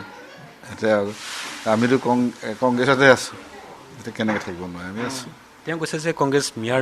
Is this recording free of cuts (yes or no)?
yes